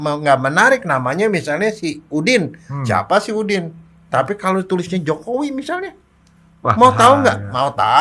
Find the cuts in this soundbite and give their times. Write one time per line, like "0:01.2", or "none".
none